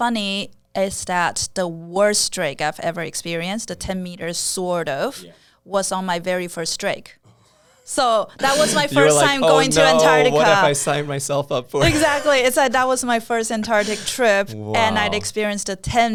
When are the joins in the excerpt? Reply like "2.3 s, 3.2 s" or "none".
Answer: none